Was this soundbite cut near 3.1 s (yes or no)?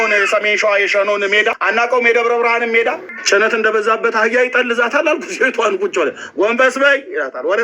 yes